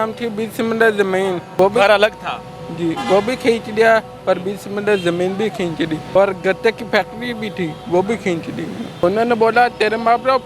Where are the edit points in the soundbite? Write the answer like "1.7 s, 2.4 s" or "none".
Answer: 1.5 s, 6.0 s, 9.0 s

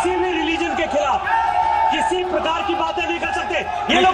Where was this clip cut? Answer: none

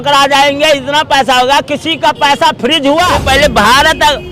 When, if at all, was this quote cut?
3.2 s

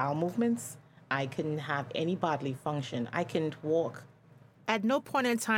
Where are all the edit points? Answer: 4.6 s

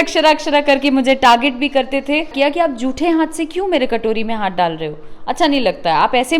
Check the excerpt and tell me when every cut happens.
2.3 s

